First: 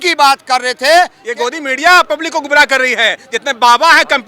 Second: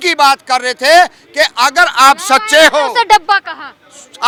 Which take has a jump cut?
first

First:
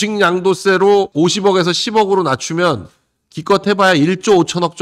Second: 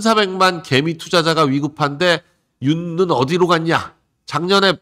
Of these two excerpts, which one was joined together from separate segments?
first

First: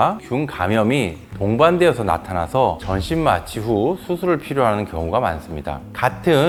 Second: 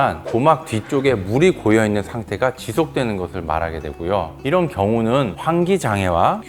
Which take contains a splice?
second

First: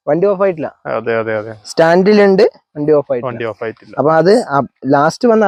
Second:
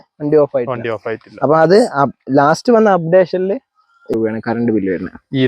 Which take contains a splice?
second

